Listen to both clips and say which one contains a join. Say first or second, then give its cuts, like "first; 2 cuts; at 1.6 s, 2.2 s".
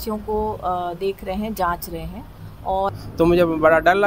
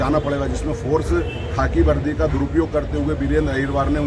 first; 1 cut; at 3.0 s